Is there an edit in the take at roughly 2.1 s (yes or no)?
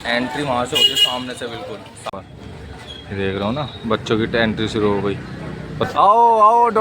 yes